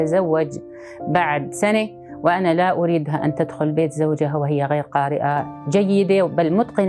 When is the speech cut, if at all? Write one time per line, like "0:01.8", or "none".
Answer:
none